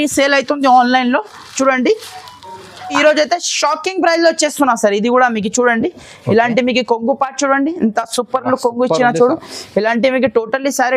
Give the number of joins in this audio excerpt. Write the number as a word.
one